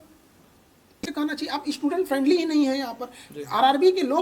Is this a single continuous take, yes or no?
no